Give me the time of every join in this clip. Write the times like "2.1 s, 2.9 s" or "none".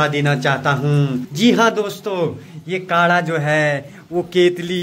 1.3 s